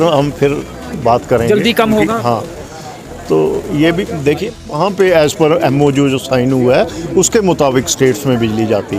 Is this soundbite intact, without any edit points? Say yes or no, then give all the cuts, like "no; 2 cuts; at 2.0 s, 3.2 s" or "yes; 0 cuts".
no; 1 cut; at 4.6 s